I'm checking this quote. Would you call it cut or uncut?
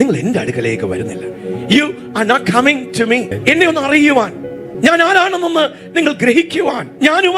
uncut